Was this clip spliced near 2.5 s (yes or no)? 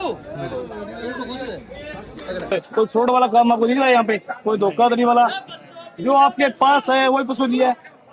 yes